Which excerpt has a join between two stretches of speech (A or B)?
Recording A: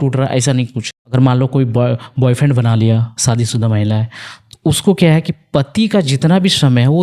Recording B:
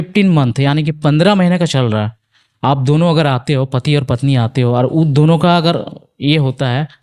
A